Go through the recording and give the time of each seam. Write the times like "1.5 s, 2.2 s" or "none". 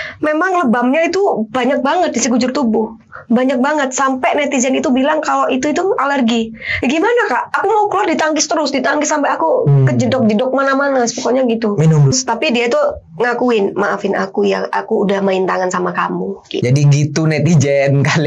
6.6 s, 12.1 s, 16.6 s

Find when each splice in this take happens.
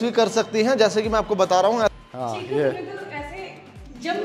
1.9 s

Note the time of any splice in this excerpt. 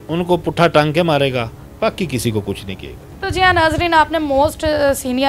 none

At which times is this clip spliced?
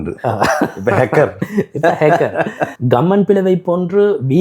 2.7 s

